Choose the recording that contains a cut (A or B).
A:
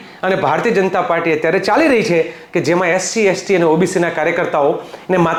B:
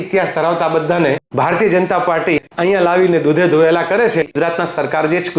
B